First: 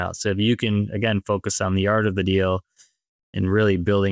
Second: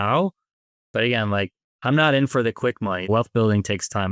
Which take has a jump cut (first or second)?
second